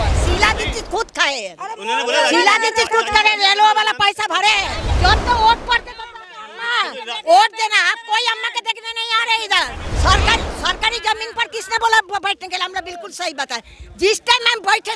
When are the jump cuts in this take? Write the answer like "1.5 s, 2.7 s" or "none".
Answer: 4.8 s, 9.8 s